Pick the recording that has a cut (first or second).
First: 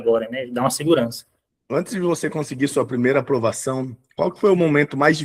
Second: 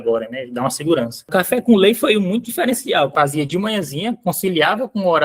second